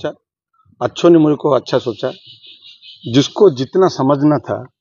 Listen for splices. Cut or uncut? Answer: uncut